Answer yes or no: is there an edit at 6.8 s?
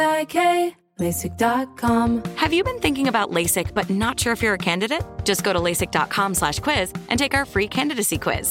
no